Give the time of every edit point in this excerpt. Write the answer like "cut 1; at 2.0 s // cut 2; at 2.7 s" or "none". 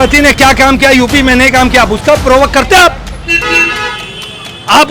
none